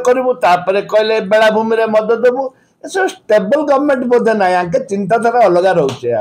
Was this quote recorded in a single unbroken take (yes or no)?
yes